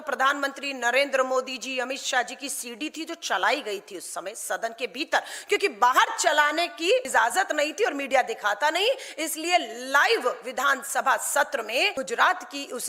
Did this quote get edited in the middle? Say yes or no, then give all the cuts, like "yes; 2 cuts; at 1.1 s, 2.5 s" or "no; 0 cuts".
yes; 2 cuts; at 7.1 s, 11.9 s